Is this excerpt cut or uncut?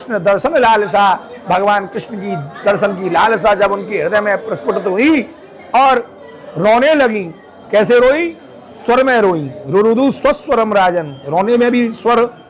uncut